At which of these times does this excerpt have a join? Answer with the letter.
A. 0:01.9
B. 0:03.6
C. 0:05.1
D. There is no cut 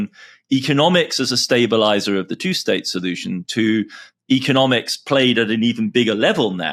D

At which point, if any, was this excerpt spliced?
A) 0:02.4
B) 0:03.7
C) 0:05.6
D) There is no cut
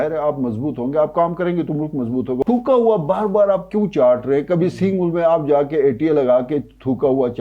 A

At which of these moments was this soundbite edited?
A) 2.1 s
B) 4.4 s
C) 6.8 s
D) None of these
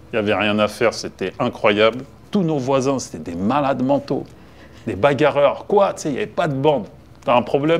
A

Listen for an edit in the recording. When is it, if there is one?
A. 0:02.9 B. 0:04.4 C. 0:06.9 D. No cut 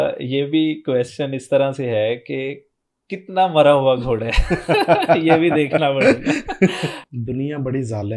C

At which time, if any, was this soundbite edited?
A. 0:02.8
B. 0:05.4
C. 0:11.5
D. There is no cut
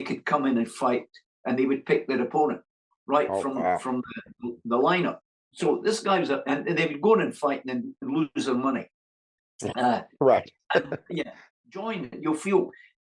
C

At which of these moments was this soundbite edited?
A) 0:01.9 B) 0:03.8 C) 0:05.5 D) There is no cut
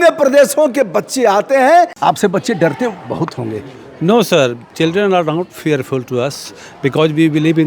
A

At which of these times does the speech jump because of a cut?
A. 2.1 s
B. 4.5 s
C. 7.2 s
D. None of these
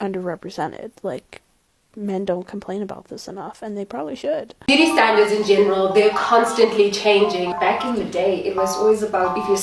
B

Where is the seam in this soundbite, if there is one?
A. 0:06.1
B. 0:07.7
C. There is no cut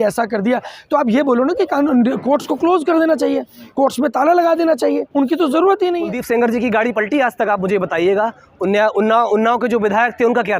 A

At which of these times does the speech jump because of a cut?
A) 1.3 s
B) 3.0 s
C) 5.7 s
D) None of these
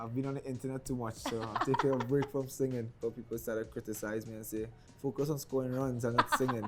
B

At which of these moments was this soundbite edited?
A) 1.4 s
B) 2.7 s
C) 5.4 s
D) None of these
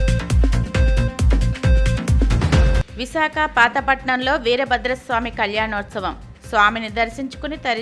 B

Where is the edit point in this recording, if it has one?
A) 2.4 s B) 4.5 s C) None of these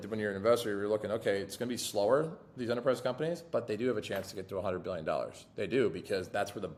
C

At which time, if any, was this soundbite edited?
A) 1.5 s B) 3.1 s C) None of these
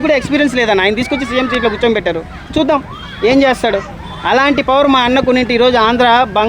C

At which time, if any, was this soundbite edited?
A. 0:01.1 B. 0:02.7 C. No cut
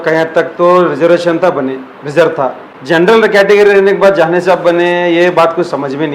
B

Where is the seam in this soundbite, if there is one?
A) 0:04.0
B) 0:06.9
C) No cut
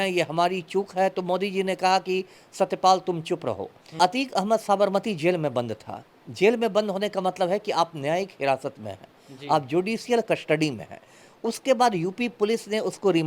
A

